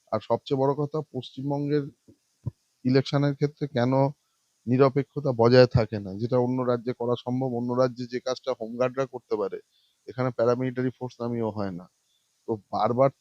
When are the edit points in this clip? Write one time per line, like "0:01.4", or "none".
none